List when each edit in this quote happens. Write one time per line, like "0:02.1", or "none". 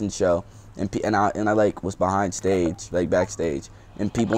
none